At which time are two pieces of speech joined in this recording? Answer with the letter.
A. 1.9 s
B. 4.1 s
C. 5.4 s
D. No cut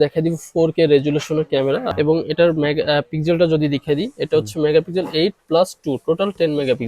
A